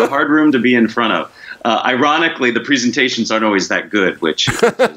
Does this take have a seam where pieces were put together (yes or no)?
no